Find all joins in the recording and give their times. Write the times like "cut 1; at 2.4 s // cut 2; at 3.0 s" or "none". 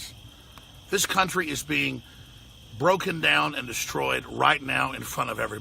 none